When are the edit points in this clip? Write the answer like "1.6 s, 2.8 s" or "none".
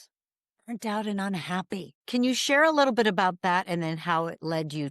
1.9 s